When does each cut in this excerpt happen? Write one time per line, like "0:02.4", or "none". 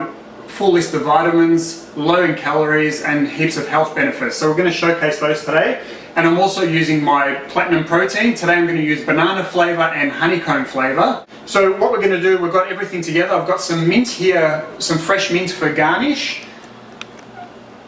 0:08.4